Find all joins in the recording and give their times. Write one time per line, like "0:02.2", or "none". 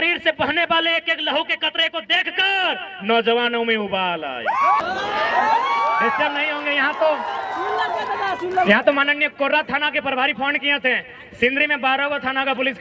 0:04.8